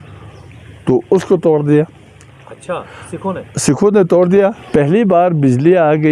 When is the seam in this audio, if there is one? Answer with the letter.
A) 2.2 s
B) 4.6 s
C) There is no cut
B